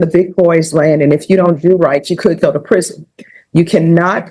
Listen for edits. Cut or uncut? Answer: uncut